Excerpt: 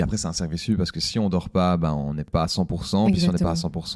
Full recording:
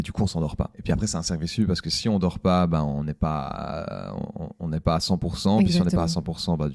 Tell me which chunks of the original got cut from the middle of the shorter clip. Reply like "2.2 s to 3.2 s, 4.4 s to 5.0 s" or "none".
3.2 s to 4.8 s